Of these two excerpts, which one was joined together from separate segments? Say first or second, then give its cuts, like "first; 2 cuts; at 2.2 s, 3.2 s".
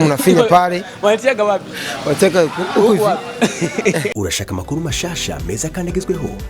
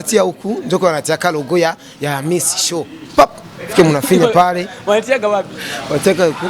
first; 1 cut; at 4.1 s